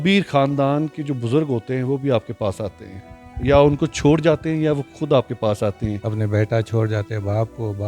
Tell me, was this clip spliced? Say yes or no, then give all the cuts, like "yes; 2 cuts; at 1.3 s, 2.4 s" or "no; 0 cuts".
yes; 1 cut; at 6.0 s